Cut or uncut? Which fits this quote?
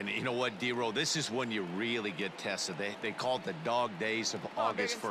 uncut